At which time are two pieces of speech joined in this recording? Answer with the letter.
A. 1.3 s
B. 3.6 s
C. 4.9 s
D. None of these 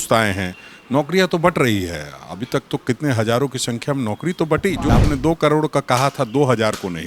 C